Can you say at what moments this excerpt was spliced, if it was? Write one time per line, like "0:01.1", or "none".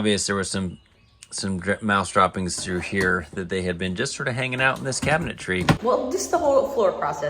0:05.8